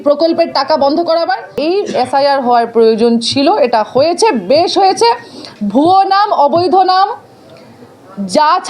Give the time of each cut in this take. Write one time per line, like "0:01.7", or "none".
0:01.6